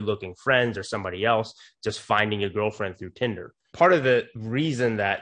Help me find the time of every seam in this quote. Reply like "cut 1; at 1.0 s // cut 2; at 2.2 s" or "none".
cut 1; at 3.6 s // cut 2; at 4.3 s